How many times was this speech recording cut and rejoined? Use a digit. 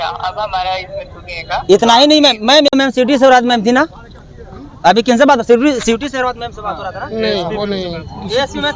1